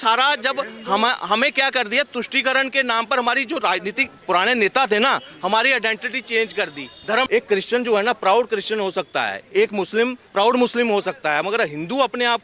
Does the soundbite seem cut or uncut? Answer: cut